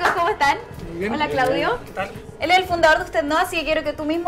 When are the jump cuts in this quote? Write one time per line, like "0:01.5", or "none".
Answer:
0:01.9